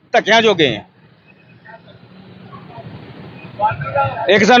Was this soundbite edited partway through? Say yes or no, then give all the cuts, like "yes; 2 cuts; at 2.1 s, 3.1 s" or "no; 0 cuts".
no; 0 cuts